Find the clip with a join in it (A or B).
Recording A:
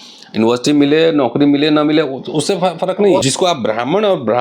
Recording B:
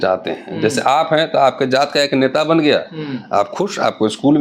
A